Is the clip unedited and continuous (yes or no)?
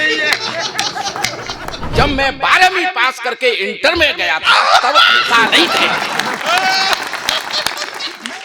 no